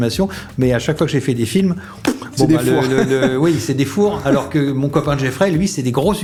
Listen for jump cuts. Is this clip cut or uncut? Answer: uncut